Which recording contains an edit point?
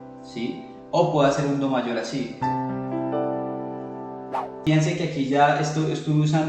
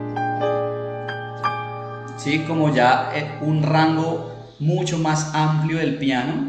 first; 1 cut; at 4.5 s

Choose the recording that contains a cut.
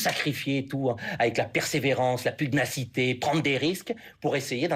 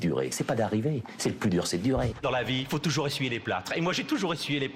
second; 1 cut; at 2.1 s

